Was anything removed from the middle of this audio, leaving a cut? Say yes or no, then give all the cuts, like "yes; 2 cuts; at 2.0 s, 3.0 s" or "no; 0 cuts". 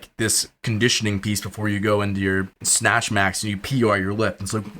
yes; 1 cut; at 2.6 s